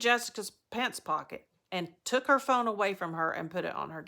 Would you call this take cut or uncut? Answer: uncut